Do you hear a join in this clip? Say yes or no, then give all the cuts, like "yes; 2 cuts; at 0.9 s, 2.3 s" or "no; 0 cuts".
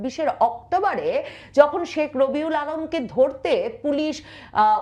no; 0 cuts